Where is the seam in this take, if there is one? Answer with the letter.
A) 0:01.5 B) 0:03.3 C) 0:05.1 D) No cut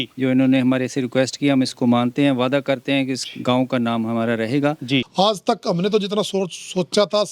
C